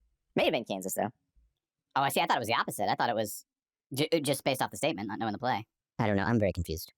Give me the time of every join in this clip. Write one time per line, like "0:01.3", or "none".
0:05.8